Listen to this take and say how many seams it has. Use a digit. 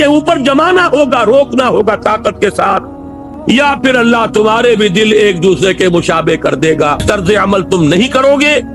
2